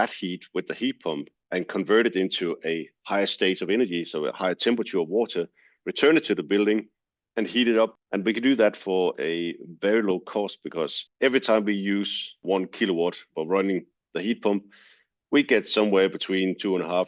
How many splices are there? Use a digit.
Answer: 4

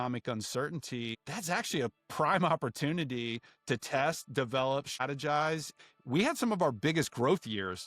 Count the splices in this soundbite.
3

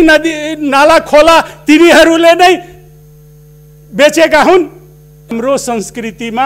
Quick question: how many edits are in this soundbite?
1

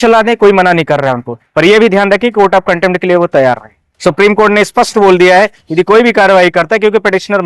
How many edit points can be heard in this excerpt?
0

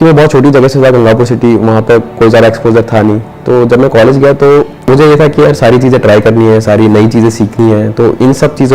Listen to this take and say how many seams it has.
1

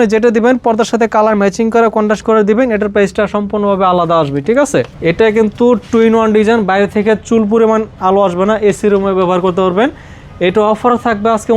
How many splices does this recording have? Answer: 1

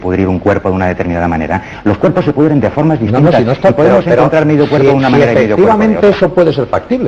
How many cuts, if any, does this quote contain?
0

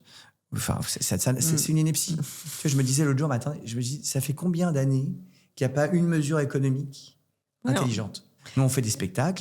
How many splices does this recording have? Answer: 1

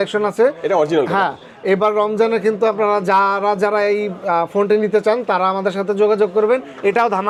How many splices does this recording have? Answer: 0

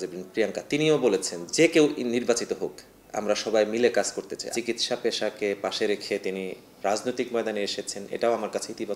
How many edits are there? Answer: 3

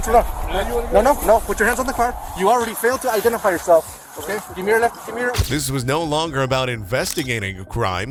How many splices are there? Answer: 0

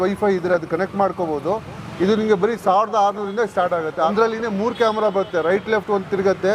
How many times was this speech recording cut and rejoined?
1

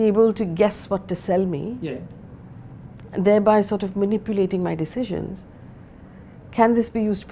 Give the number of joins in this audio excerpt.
0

